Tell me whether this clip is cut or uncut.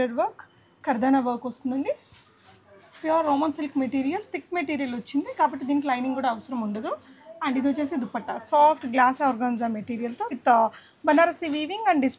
uncut